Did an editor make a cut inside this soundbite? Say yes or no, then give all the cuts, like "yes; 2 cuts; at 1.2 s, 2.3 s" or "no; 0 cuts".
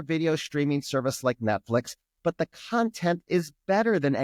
no; 0 cuts